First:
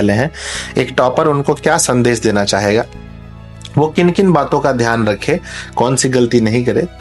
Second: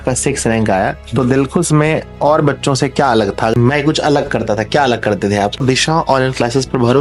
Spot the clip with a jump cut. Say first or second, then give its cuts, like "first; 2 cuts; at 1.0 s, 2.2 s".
second; 2 cuts; at 3.5 s, 5.6 s